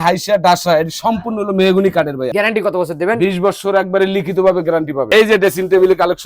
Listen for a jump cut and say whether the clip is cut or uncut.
cut